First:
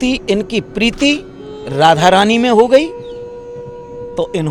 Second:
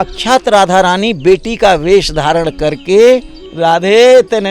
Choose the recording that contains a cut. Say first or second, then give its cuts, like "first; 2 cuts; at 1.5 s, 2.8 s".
second; 1 cut; at 3.4 s